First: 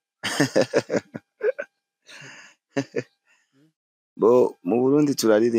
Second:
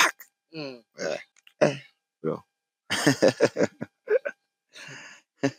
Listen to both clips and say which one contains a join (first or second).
second